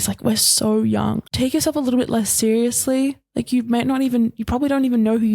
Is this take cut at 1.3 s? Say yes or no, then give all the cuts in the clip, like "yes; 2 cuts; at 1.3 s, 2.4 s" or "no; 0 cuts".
yes; 1 cut; at 1.3 s